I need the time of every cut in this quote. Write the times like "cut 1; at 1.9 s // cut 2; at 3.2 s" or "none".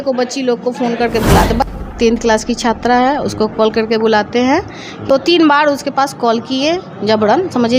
cut 1; at 1.7 s // cut 2; at 5.1 s